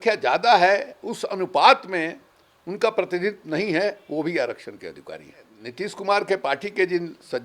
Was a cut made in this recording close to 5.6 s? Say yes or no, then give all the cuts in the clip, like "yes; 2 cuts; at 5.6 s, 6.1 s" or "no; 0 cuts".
yes; 1 cut; at 5.6 s